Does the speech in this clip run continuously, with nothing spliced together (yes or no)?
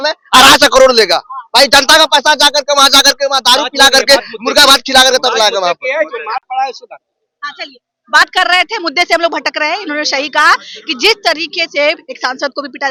yes